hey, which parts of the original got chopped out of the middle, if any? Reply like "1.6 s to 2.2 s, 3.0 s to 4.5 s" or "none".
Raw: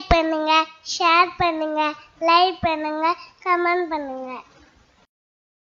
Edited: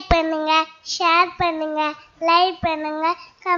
none